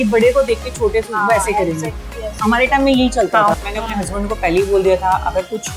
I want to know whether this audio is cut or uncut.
cut